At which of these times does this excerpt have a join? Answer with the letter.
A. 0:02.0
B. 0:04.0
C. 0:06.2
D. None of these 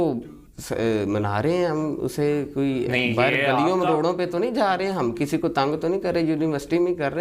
D